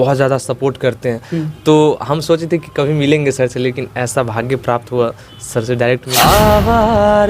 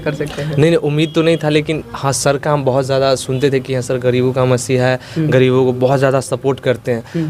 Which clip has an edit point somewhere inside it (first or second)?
first